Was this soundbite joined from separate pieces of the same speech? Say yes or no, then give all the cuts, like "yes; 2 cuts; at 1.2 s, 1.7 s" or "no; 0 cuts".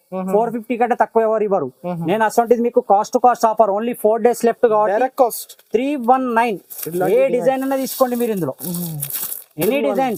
no; 0 cuts